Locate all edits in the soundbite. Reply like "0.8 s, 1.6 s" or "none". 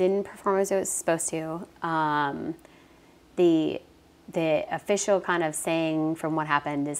none